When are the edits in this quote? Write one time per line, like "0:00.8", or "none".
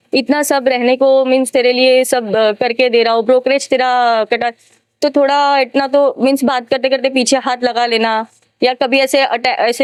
none